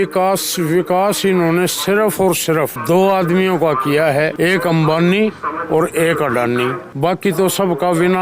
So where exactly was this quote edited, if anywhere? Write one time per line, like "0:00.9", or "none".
0:02.8
0:04.3
0:06.8